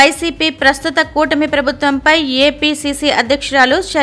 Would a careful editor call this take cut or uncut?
uncut